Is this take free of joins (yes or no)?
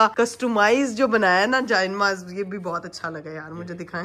yes